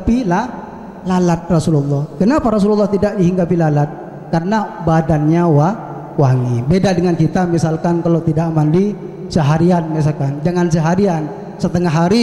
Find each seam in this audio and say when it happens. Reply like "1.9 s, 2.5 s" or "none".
none